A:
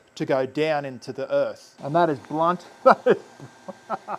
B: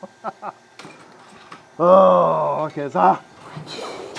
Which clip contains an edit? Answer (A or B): A